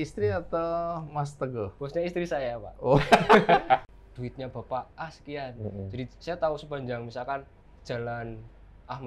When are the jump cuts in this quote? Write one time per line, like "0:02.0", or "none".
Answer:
0:03.9